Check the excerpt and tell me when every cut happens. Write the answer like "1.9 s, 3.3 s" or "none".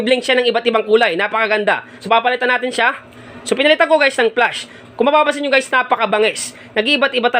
1.9 s, 3.3 s